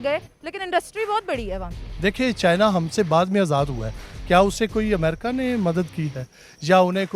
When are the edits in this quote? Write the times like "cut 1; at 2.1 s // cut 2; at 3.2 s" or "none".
cut 1; at 1.8 s